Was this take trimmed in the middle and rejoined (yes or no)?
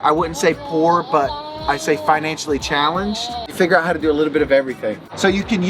no